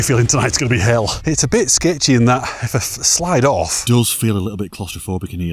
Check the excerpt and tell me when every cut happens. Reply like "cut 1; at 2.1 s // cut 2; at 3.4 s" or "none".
cut 1; at 1.2 s // cut 2; at 3.8 s